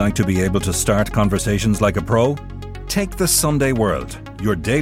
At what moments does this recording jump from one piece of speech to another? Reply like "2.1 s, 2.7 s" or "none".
none